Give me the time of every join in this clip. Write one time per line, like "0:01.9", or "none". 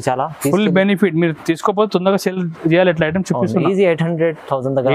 none